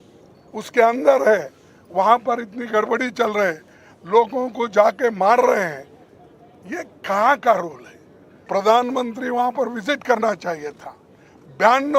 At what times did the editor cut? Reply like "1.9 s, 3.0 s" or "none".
8.5 s